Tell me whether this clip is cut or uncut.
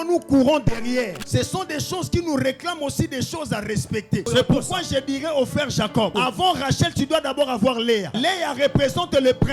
cut